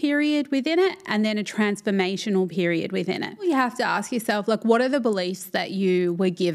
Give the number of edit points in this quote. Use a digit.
1